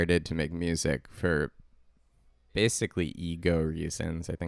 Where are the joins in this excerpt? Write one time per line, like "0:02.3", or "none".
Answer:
none